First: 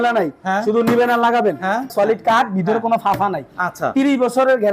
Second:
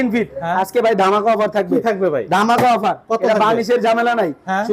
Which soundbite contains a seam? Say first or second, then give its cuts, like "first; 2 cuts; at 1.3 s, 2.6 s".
first; 1 cut; at 1.9 s